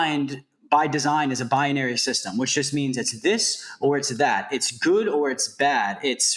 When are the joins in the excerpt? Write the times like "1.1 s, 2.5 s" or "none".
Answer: none